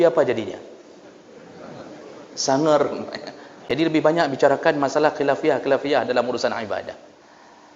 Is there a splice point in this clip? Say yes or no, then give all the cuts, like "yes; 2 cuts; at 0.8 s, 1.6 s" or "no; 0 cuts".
yes; 1 cut; at 3.6 s